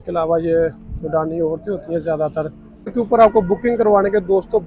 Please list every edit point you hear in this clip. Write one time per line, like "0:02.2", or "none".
0:02.9